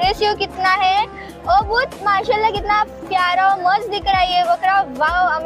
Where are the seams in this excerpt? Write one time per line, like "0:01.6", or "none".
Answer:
none